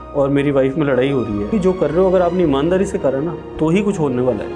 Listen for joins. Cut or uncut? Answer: cut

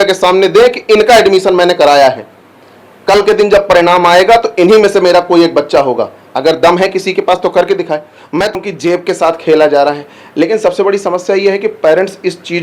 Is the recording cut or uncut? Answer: cut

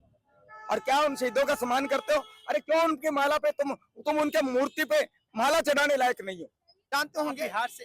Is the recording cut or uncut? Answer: cut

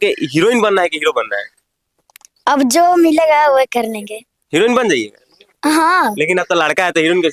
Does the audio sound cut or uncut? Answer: uncut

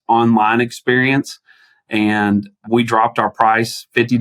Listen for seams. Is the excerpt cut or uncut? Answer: uncut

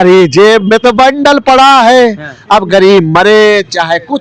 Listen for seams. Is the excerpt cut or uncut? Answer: uncut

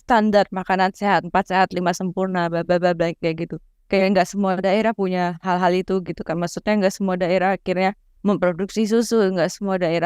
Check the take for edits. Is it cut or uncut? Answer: uncut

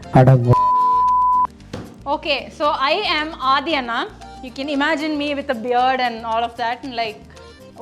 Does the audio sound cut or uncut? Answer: cut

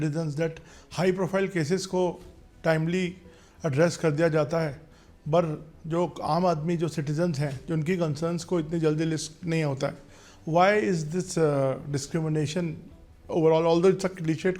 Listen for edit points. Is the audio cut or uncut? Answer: uncut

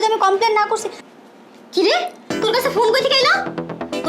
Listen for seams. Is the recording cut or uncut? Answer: cut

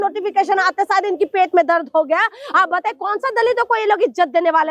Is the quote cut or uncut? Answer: uncut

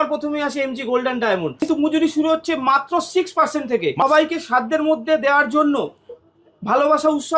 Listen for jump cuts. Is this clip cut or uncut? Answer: cut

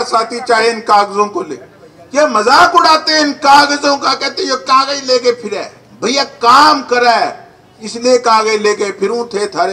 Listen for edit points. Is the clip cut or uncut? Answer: uncut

